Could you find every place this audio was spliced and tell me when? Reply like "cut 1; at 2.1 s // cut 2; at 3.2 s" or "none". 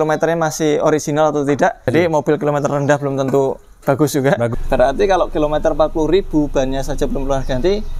cut 1; at 1.9 s // cut 2; at 4.5 s